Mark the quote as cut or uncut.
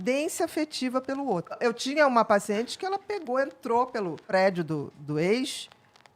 cut